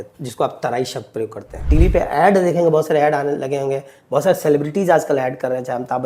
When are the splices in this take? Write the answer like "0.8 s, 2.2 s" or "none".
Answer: 1.6 s